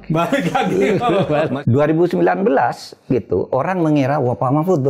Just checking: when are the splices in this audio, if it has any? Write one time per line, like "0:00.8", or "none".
0:01.6